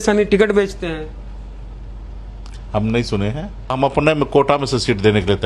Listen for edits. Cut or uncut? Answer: cut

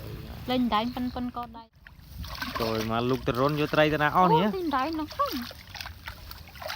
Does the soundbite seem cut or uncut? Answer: cut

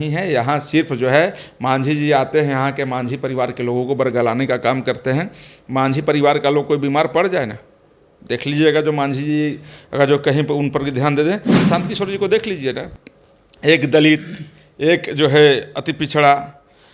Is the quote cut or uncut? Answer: cut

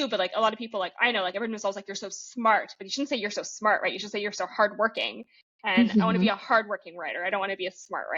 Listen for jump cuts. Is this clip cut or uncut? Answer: uncut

